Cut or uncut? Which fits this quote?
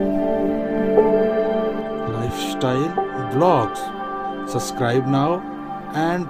uncut